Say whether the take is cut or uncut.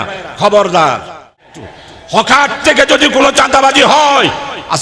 cut